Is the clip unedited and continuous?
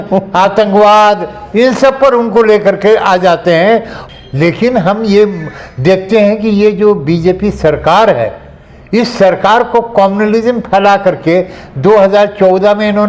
no; 1 cut; at 3.9 s

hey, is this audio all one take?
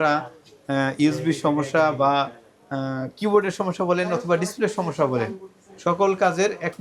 yes; 0 cuts

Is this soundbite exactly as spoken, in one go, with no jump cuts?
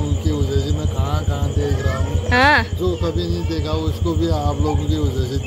yes; 0 cuts

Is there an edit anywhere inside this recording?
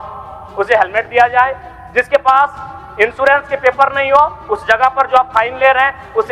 no; 0 cuts

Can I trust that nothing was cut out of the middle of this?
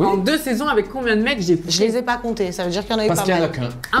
yes; 0 cuts

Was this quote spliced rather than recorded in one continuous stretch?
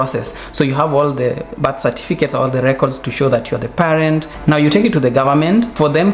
no; 0 cuts

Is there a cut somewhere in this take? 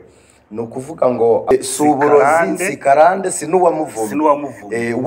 yes; 1 cut; at 1.5 s

